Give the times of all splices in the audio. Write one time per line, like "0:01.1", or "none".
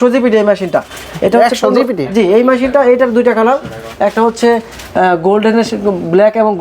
none

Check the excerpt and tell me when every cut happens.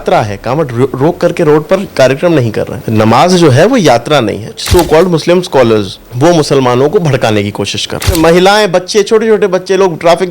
0:02.8
0:04.5
0:06.0
0:08.1

